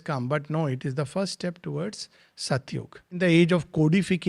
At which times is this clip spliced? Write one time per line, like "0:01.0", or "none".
0:03.2